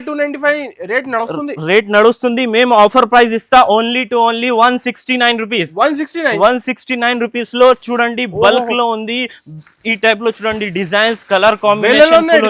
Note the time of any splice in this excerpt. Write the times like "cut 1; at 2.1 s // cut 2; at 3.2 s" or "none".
none